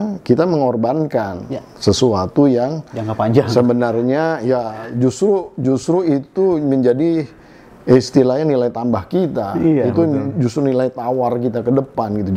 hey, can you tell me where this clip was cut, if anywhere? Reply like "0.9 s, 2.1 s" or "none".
none